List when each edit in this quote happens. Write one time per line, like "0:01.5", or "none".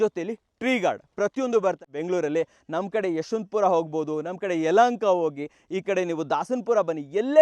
0:01.9